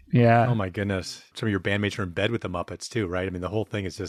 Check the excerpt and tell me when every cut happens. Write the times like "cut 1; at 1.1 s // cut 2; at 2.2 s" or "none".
none